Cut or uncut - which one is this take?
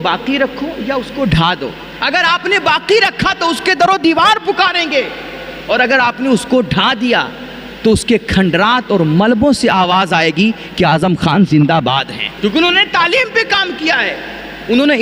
uncut